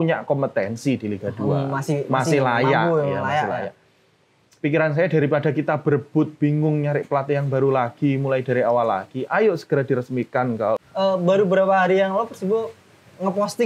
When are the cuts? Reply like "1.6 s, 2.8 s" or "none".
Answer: 10.8 s